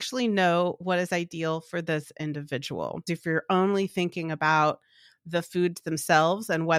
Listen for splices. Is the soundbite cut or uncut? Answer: cut